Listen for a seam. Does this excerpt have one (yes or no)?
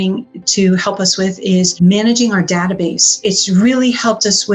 yes